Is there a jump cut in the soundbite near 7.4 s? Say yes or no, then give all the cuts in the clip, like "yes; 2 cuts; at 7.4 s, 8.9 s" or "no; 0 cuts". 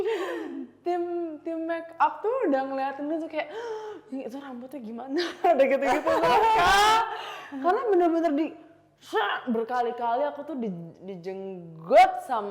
no; 0 cuts